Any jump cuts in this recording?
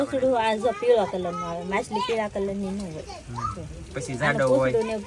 no; 0 cuts

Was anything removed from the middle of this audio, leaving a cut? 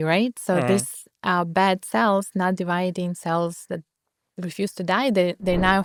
no; 0 cuts

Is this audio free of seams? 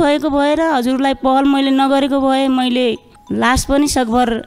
yes; 0 cuts

